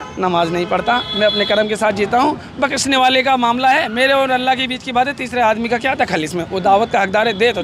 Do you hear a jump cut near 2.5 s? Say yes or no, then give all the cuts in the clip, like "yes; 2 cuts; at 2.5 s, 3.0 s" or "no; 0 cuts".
no; 0 cuts